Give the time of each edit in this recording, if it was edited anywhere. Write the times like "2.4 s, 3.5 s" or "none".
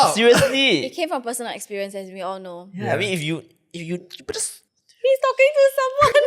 none